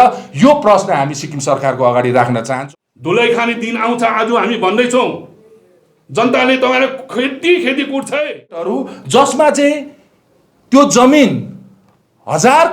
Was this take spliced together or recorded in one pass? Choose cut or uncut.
cut